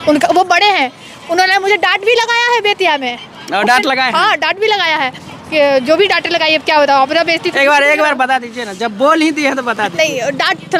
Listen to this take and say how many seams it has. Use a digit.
0